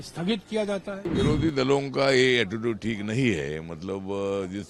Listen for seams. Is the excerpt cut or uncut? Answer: cut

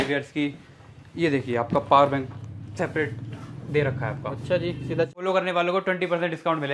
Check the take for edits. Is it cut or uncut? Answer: cut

